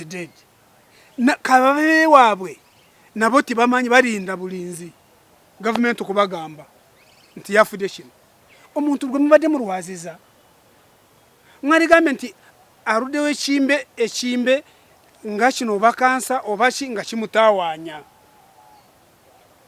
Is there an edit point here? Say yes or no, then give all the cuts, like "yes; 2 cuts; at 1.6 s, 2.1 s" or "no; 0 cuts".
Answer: no; 0 cuts